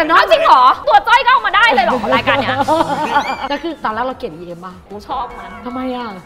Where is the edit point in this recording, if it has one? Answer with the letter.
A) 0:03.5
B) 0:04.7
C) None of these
A